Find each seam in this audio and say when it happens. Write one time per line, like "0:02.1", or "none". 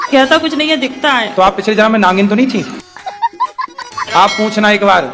none